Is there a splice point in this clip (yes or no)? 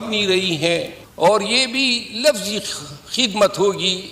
yes